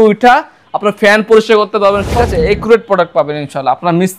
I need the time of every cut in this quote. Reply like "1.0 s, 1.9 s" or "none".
2.2 s